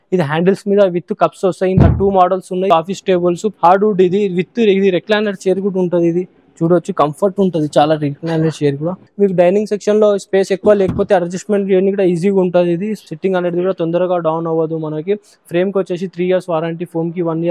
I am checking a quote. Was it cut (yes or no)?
yes